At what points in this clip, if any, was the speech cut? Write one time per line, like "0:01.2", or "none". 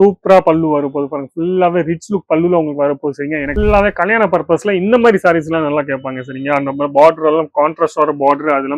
0:03.5